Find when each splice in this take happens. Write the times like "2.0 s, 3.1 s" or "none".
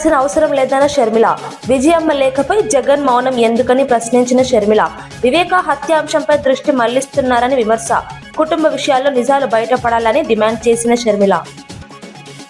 none